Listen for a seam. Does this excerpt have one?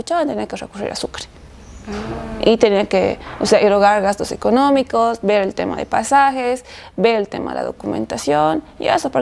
no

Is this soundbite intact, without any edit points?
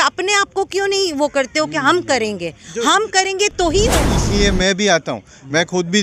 no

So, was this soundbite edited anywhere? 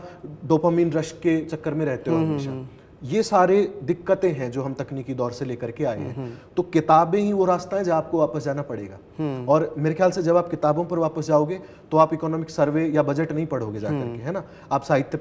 no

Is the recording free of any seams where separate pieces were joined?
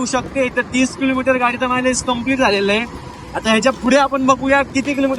yes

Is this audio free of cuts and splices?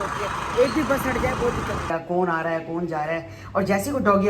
no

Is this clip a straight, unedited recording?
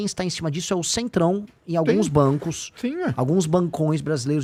yes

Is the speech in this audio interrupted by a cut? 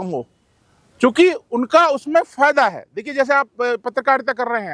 no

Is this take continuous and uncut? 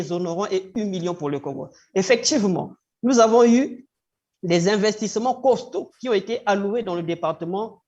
yes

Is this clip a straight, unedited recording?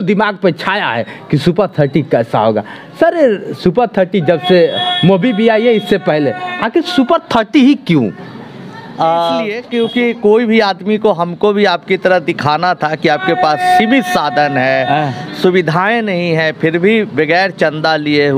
no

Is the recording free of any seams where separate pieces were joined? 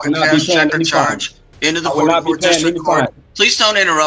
yes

